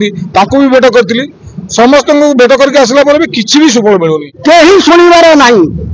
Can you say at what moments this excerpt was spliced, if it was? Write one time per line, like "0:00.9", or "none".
0:04.3